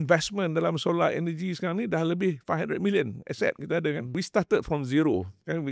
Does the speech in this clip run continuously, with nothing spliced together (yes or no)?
no